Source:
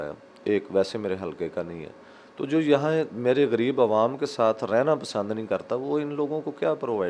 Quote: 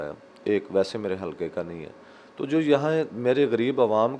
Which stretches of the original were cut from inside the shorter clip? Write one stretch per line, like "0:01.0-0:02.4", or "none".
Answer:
none